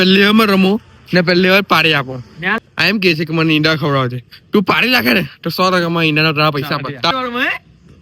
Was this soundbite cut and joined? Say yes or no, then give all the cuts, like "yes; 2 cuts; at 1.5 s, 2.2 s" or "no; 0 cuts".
yes; 2 cuts; at 2.5 s, 7.1 s